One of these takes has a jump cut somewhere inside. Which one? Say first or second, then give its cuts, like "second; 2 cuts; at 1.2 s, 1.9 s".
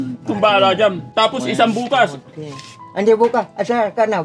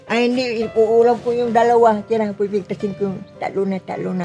first; 1 cut; at 1.1 s